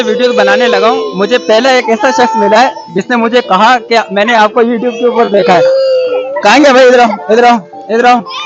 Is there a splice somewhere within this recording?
no; 0 cuts

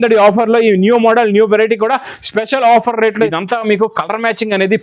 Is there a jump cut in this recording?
yes; 1 cut; at 3.3 s

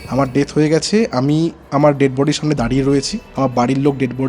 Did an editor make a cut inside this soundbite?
yes; 2 cuts; at 1.6 s, 3.2 s

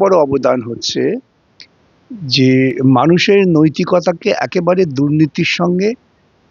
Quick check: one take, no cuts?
yes; 0 cuts

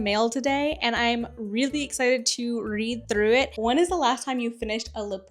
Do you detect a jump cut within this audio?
yes; 1 cut; at 3.5 s

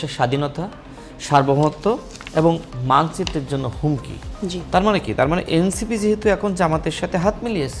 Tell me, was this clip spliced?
no; 0 cuts

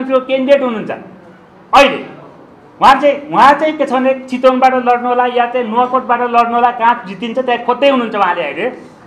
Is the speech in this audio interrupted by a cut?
no; 0 cuts

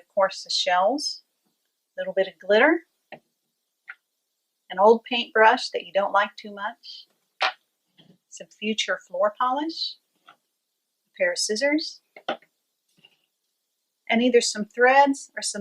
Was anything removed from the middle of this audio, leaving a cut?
no; 0 cuts

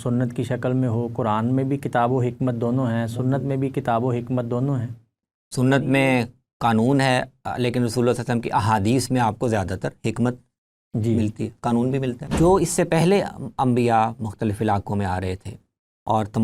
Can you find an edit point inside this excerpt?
yes; 1 cut; at 12.2 s

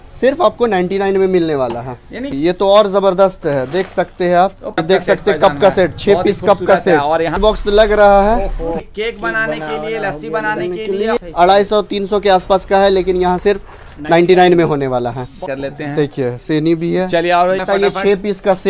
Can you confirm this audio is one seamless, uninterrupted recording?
no; 7 cuts; at 2.3 s, 4.7 s, 7.3 s, 8.8 s, 11.2 s, 15.4 s, 17.6 s

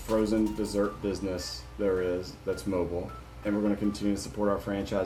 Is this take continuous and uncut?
yes; 0 cuts

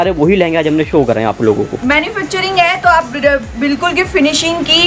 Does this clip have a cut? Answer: no; 0 cuts

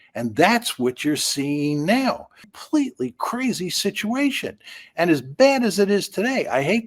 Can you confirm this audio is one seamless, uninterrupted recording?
no; 1 cut; at 2.5 s

